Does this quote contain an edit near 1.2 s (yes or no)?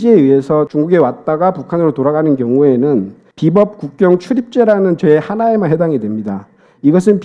no